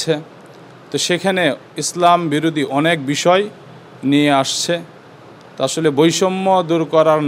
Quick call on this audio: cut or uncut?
uncut